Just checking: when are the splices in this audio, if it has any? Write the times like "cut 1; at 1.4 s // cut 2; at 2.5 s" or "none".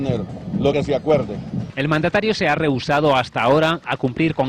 none